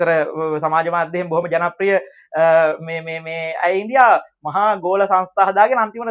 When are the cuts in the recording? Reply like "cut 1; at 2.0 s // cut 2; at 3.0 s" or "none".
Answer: none